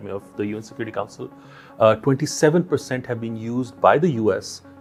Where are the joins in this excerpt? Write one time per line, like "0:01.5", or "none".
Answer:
none